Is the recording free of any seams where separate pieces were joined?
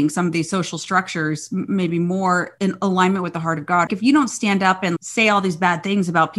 no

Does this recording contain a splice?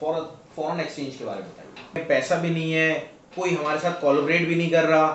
yes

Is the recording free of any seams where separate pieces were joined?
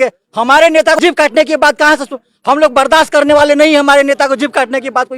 no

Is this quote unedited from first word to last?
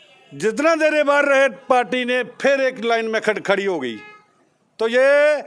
yes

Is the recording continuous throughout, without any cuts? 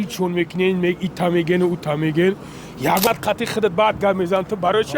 no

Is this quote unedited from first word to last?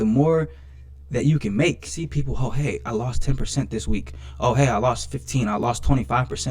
no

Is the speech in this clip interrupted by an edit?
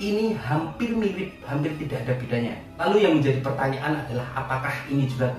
no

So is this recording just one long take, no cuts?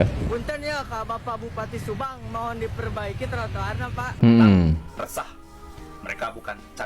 no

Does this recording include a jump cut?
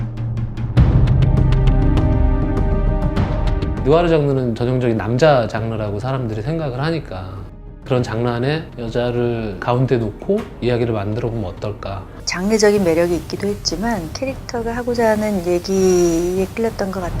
yes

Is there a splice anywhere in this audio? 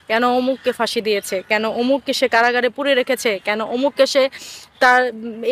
no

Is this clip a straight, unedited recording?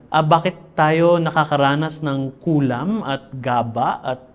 yes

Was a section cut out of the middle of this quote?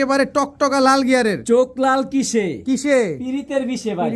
no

